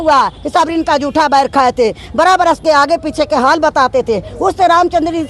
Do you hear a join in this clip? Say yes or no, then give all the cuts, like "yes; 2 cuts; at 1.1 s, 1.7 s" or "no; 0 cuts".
no; 0 cuts